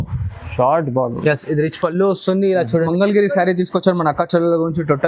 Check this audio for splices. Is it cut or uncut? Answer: cut